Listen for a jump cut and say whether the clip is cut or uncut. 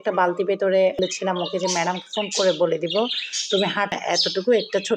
cut